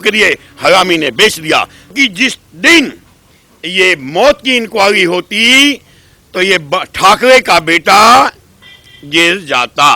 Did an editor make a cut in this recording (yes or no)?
yes